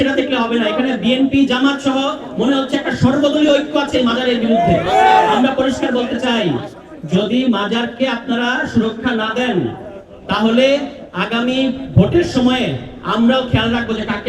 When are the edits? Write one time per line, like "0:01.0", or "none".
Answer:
none